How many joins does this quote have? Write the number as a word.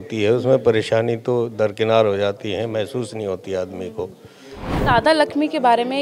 one